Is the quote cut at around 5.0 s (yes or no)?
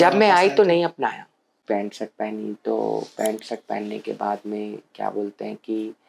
no